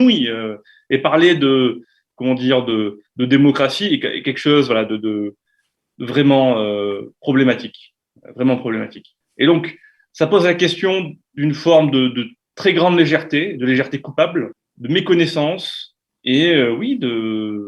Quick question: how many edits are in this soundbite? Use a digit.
0